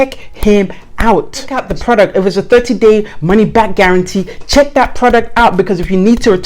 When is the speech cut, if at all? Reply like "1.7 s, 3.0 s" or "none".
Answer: 1.6 s